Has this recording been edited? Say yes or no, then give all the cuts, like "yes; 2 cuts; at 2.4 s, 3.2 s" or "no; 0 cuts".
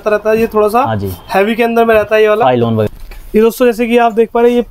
yes; 1 cut; at 2.9 s